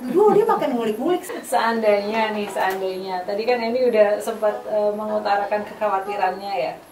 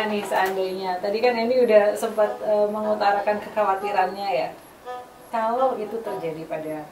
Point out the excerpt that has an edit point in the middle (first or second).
first